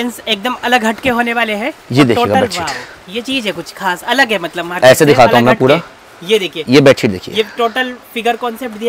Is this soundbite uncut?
yes; 0 cuts

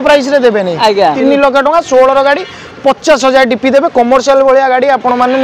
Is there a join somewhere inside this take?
yes; 1 cut; at 1.2 s

